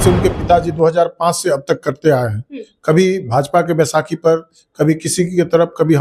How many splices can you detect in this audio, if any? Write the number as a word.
zero